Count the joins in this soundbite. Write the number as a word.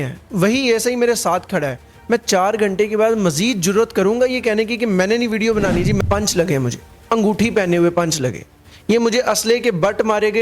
one